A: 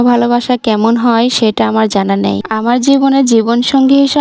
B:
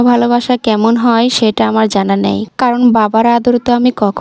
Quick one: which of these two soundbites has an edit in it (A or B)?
A